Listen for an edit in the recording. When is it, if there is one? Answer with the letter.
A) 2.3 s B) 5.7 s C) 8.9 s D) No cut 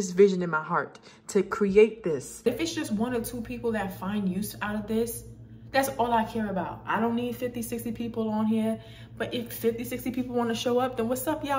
A